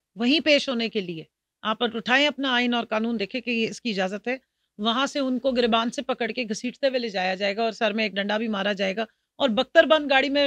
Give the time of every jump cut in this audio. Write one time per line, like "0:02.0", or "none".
none